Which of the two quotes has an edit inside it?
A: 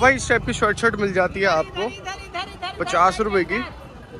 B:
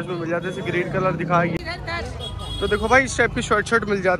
B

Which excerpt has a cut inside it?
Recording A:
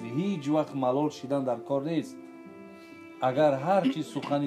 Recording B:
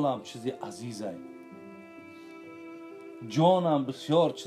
B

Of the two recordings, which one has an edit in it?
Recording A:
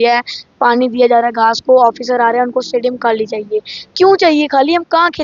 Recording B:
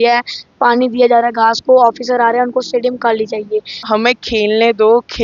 B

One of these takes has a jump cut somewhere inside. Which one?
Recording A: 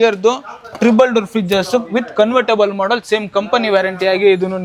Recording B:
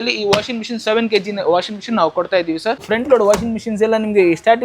B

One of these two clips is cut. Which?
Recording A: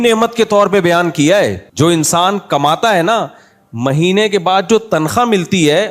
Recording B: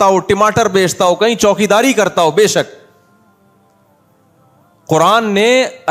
A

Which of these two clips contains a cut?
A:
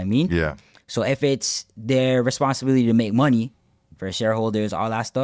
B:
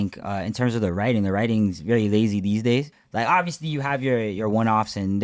B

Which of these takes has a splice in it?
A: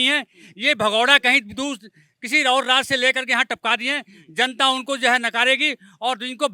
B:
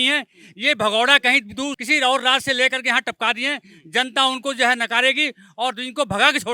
B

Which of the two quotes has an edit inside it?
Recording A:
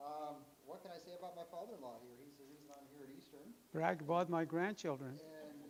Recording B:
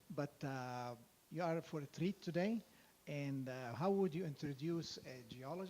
B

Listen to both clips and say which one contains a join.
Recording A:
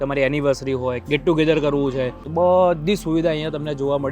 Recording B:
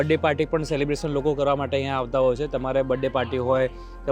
A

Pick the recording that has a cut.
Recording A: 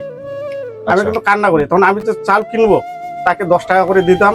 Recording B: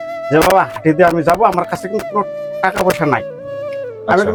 A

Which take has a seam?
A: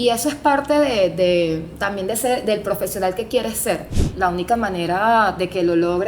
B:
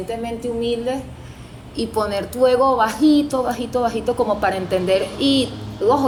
A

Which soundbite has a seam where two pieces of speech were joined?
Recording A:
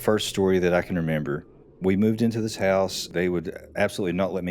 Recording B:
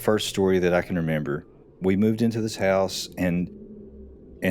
A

